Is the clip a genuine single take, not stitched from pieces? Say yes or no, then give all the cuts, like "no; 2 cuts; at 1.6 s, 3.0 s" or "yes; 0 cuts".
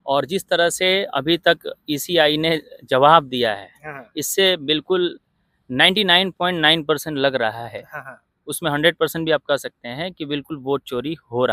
yes; 0 cuts